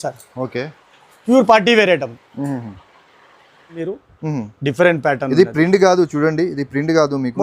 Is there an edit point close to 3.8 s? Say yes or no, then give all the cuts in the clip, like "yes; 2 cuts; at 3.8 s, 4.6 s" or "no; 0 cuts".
yes; 1 cut; at 3.8 s